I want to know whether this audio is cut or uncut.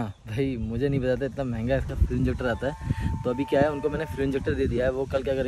uncut